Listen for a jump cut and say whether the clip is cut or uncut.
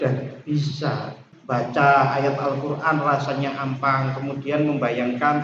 cut